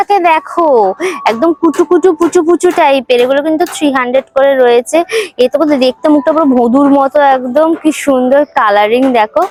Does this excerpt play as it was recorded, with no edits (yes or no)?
yes